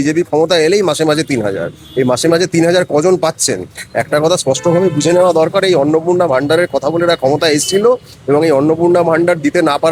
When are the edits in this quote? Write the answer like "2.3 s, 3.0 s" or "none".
none